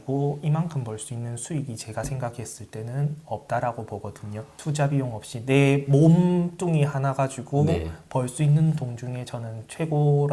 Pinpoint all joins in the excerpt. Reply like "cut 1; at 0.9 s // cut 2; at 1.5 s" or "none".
none